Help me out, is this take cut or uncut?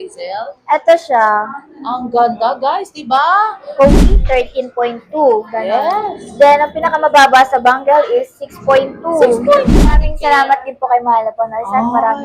cut